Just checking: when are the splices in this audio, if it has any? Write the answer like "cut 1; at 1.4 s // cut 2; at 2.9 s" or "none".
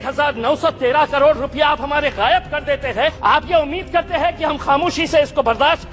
cut 1; at 3.2 s

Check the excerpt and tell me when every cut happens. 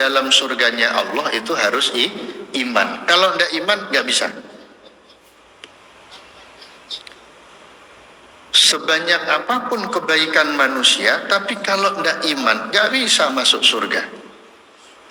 none

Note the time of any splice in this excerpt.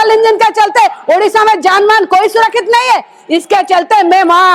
none

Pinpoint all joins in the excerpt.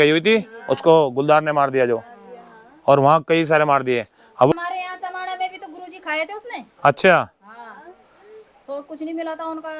cut 1; at 4.5 s

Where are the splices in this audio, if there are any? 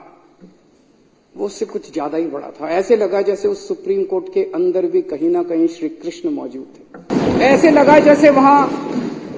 cut 1; at 7.1 s

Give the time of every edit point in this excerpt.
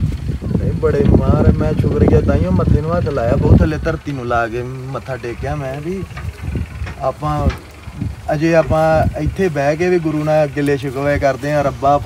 none

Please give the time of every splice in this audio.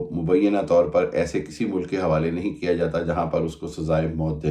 none

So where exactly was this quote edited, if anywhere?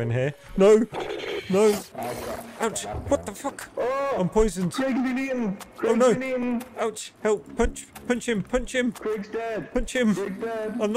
cut 1; at 1.9 s

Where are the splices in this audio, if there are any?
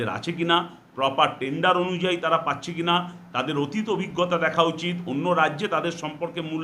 none

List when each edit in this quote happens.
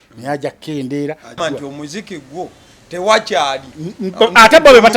cut 1; at 1.4 s

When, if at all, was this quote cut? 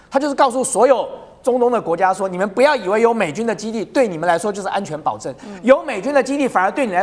none

